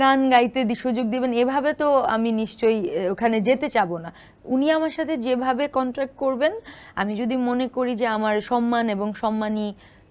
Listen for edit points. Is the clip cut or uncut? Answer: uncut